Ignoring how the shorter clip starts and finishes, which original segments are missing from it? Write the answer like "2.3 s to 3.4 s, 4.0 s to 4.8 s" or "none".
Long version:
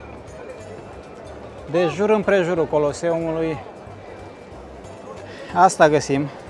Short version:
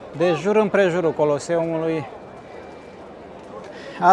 none